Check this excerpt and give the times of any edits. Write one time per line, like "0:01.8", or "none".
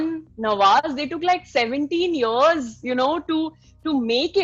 none